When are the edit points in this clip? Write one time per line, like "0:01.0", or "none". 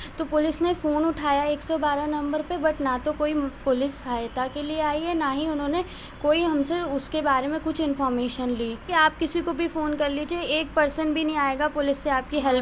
0:08.8